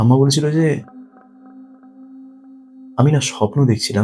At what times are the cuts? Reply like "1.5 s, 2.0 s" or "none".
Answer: none